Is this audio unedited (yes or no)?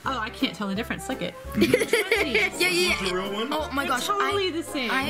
yes